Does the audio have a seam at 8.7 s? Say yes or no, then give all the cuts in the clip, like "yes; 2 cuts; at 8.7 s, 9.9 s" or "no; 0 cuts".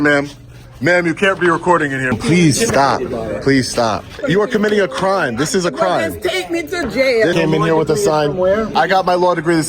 yes; 4 cuts; at 2.1 s, 4.2 s, 7.3 s, 8.7 s